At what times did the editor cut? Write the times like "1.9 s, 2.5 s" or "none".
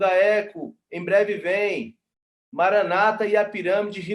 none